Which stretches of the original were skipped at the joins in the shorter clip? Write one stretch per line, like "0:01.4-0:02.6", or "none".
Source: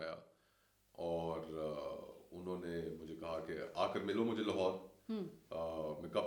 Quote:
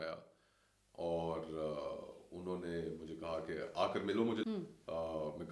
0:04.4-0:05.1